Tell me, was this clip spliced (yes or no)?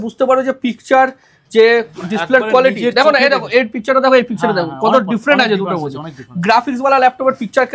no